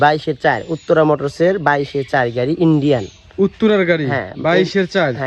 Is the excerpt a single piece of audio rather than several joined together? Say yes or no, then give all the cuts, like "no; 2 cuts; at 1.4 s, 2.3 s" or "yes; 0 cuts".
yes; 0 cuts